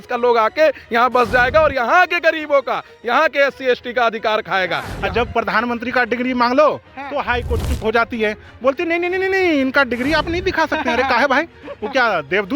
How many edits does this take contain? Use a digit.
1